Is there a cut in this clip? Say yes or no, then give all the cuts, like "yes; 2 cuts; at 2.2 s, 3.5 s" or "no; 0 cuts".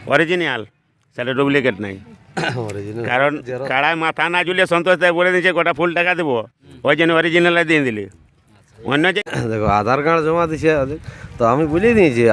no; 0 cuts